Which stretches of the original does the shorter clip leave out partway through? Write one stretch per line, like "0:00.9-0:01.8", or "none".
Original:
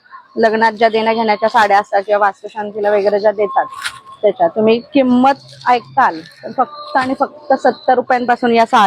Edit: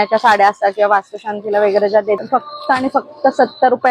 0:03.5-0:06.5